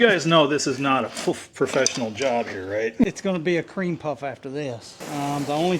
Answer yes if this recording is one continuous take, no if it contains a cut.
no